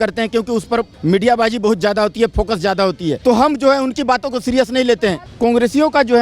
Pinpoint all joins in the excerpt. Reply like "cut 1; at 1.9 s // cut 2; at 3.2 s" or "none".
cut 1; at 0.9 s // cut 2; at 3.2 s // cut 3; at 5.2 s